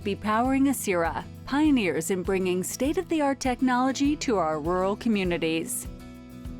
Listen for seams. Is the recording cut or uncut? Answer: cut